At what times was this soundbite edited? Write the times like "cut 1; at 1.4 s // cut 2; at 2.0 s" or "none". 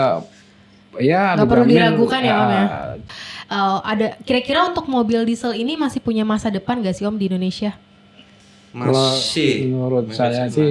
cut 1; at 3.1 s

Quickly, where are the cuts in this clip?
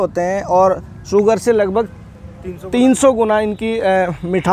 none

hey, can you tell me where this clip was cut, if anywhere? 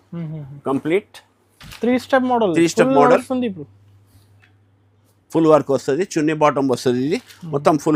none

